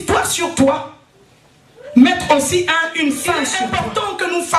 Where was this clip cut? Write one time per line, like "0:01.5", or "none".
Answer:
0:03.5